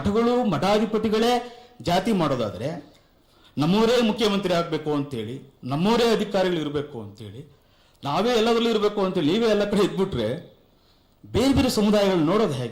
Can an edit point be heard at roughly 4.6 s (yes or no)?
no